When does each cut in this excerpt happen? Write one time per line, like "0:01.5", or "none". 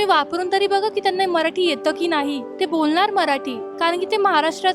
0:02.5
0:03.6